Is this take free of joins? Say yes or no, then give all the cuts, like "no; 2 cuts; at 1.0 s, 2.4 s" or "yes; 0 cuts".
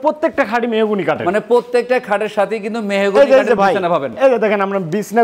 yes; 0 cuts